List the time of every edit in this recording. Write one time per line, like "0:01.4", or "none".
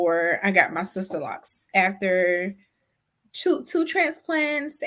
0:01.4